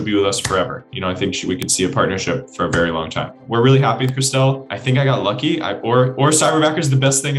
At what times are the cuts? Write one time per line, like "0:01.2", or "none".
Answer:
0:03.4
0:04.7